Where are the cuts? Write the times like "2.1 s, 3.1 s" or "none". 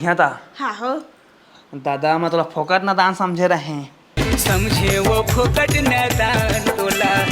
4.1 s

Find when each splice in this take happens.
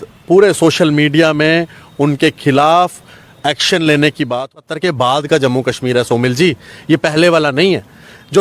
4.4 s

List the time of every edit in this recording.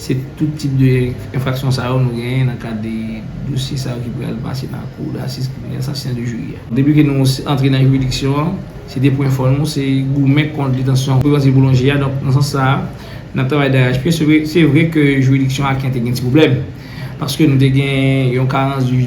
6.7 s, 11.2 s

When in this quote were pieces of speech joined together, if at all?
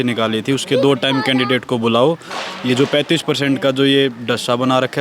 none

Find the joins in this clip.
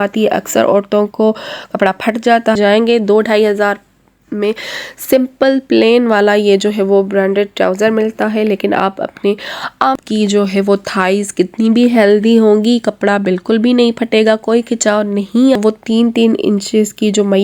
2.6 s, 9.9 s, 15.6 s

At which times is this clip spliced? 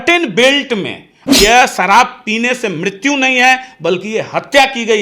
1.2 s

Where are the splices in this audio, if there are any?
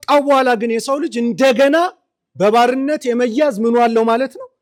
none

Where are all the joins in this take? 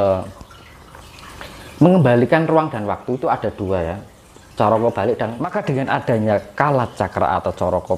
5.6 s

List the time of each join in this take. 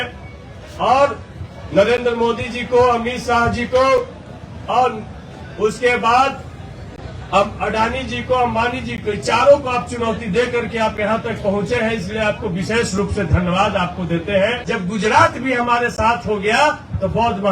14.6 s

